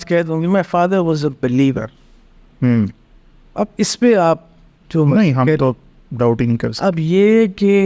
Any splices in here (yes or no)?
no